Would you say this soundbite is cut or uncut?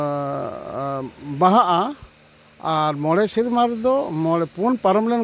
uncut